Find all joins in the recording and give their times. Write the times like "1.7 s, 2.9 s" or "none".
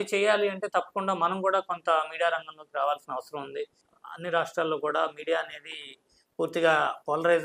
3.8 s